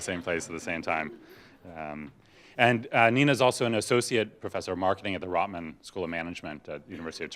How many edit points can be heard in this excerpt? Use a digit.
0